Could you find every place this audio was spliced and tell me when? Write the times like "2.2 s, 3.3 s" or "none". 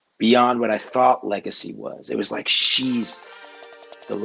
none